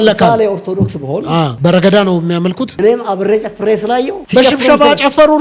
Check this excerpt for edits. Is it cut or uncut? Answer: cut